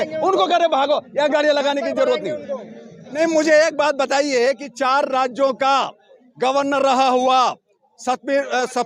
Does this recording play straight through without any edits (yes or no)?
no